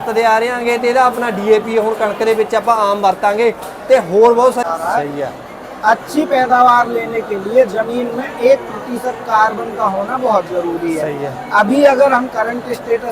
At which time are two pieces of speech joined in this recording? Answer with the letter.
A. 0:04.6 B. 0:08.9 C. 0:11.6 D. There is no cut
A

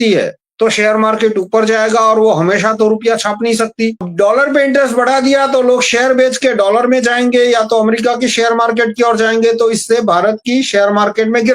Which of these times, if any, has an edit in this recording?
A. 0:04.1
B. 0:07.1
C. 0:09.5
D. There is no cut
A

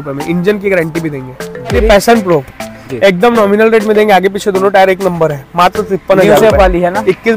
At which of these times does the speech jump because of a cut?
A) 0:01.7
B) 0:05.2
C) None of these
A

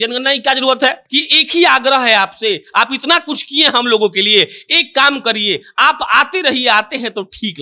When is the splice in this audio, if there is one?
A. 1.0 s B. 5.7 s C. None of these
A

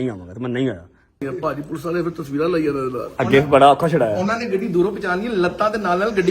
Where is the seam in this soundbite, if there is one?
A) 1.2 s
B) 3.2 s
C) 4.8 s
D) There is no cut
A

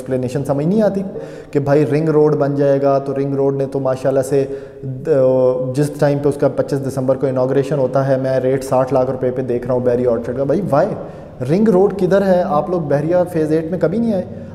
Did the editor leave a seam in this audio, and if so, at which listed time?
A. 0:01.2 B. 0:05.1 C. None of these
A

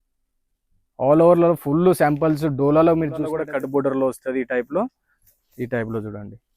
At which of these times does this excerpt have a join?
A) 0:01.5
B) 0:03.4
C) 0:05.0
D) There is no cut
B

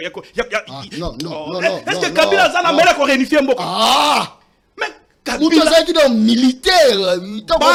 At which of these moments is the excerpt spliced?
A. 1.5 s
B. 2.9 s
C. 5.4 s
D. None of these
D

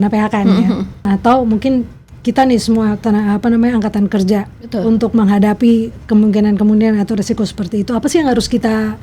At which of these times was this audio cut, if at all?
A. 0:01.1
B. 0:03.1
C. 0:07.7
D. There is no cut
A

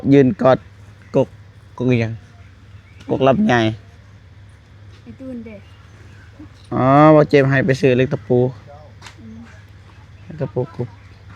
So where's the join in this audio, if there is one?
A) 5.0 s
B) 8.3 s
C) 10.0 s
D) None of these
D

